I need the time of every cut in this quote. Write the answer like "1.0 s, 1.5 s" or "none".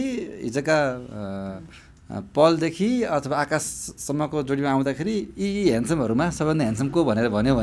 none